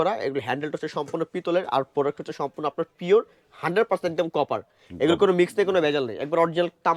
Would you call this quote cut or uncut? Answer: uncut